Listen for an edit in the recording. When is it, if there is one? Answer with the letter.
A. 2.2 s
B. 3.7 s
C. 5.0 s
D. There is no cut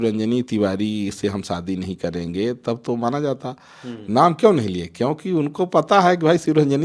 D